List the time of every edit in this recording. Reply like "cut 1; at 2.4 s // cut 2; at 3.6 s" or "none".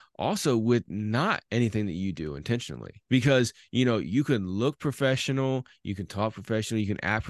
cut 1; at 2.9 s